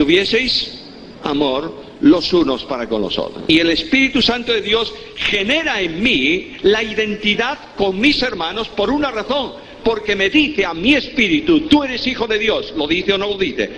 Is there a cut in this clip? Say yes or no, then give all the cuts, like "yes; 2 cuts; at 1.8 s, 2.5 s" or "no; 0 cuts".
no; 0 cuts